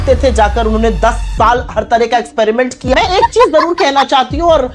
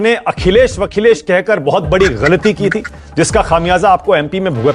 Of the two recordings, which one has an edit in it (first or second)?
first